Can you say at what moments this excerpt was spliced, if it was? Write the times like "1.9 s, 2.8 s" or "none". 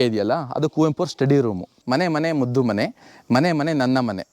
1.7 s